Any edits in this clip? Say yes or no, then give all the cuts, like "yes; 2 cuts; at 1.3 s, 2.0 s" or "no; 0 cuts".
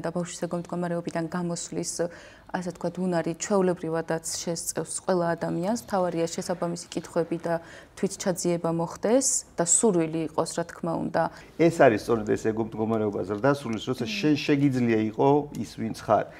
yes; 1 cut; at 11.4 s